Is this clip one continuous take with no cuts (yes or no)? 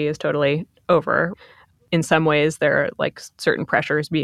no